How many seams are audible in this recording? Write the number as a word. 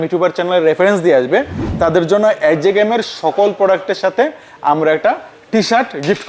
zero